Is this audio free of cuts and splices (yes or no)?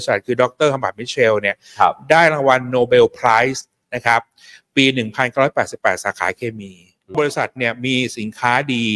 yes